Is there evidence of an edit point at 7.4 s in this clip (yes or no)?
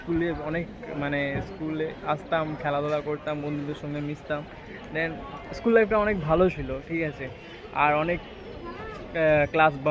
no